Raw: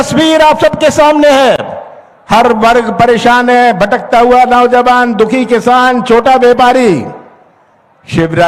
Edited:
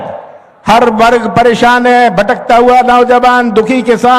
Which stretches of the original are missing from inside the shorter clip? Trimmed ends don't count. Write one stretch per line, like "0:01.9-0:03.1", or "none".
none